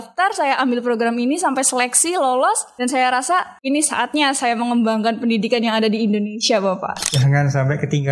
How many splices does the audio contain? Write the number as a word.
three